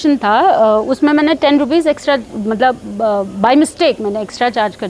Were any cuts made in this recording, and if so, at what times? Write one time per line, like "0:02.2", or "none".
none